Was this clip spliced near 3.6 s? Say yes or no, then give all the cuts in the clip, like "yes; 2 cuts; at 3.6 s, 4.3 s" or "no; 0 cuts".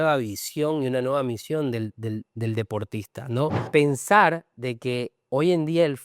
yes; 1 cut; at 3.6 s